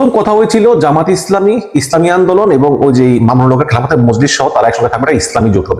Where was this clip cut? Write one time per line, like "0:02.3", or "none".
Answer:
none